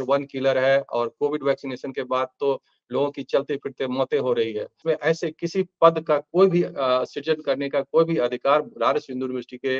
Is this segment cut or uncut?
cut